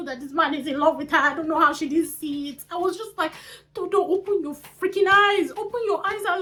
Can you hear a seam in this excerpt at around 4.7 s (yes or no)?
no